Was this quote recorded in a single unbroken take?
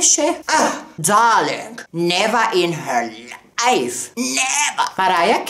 yes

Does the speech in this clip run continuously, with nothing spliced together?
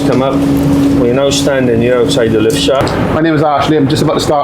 no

